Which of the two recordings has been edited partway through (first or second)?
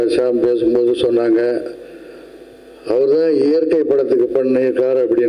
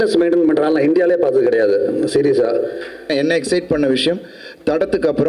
second